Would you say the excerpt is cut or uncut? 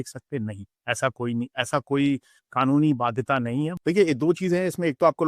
cut